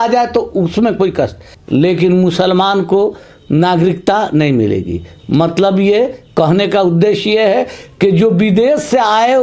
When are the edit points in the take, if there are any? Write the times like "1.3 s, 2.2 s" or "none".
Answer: 1.5 s